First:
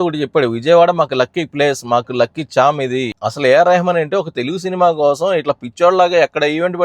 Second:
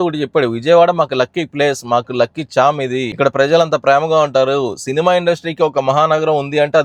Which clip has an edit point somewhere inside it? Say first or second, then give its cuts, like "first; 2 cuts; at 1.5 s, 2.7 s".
first; 1 cut; at 3.2 s